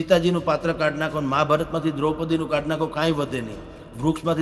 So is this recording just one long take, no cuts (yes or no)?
yes